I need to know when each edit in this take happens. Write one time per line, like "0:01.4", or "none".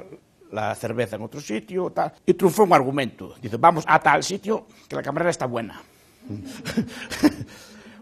0:02.2